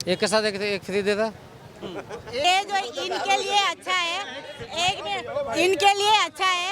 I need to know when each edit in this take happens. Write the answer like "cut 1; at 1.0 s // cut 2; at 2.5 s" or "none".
cut 1; at 2.4 s